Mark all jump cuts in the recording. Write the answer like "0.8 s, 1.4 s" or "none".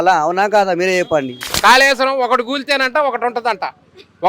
1.4 s